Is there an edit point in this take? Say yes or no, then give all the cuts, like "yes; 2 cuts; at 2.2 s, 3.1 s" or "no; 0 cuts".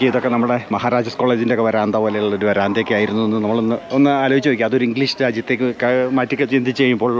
no; 0 cuts